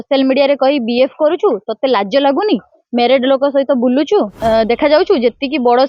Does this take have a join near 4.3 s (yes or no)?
yes